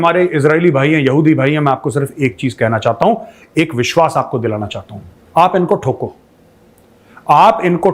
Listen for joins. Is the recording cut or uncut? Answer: uncut